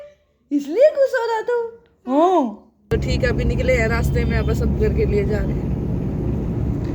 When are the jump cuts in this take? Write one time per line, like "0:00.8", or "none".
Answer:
0:02.8